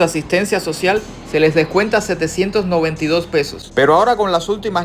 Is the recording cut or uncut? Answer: cut